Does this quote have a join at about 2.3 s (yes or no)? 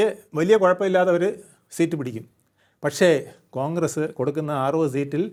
no